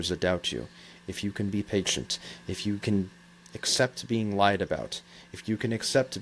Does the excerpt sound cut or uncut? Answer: uncut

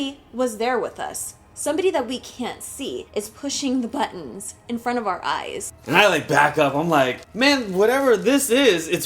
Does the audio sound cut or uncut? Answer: cut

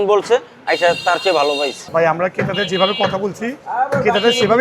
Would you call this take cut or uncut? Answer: cut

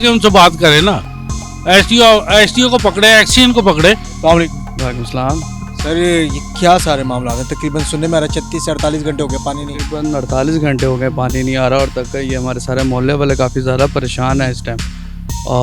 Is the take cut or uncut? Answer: uncut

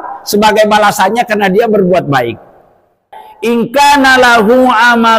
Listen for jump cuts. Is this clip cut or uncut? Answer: cut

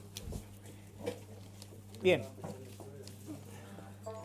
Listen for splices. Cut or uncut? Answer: uncut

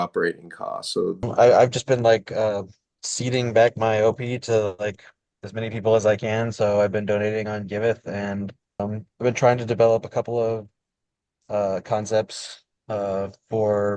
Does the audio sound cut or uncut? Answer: cut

